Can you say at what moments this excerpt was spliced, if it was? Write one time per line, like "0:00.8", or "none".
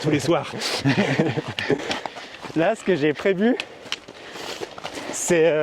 none